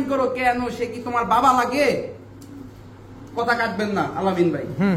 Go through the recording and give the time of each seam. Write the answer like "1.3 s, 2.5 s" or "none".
none